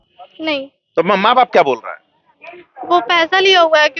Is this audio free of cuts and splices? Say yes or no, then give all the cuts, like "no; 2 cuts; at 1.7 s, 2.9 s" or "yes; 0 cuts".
yes; 0 cuts